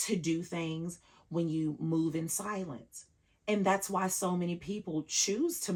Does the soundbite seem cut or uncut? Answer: uncut